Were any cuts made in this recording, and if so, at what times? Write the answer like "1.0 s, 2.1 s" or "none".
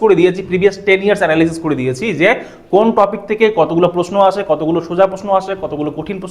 none